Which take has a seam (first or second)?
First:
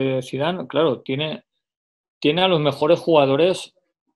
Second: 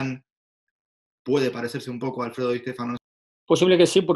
second